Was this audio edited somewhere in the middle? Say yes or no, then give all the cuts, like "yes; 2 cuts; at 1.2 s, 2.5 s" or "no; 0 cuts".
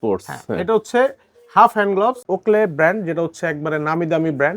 yes; 1 cut; at 2.2 s